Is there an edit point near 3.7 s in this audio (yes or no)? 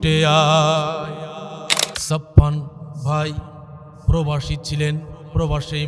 no